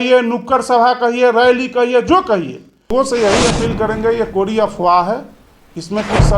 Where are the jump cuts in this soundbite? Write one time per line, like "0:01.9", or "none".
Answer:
0:02.8

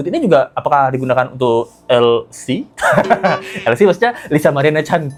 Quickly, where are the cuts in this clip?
none

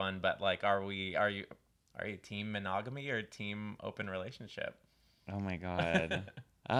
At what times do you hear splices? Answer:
none

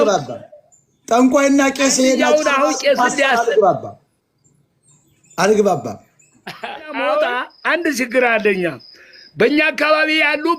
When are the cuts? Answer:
0:07.5

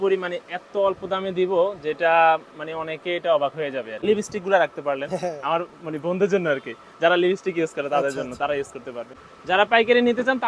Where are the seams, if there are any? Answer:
0:04.0
0:09.3

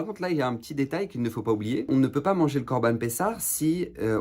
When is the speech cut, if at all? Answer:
0:01.9

